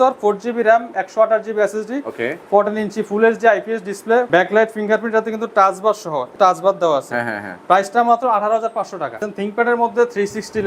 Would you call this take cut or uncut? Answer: cut